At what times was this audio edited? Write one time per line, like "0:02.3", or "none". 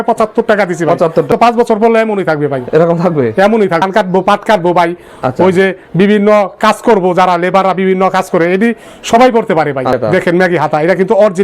0:01.3
0:03.8
0:10.0